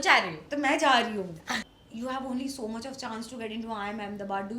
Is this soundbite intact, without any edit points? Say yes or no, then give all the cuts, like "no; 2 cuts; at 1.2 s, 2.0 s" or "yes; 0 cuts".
no; 1 cut; at 1.6 s